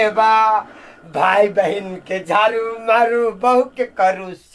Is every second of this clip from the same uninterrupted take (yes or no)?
yes